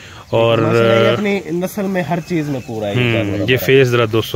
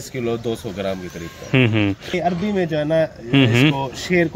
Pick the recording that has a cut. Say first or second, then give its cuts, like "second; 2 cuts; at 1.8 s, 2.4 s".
second; 1 cut; at 2.1 s